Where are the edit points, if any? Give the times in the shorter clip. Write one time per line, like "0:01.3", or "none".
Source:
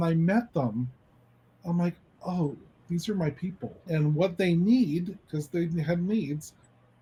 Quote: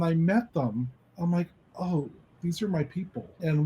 0:01.0